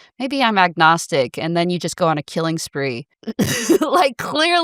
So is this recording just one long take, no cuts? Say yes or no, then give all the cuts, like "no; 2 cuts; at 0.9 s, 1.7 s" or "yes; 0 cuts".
no; 1 cut; at 3.1 s